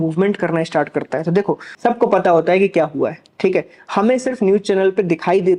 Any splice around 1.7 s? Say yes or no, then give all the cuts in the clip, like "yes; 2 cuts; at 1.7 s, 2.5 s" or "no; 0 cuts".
yes; 1 cut; at 1.7 s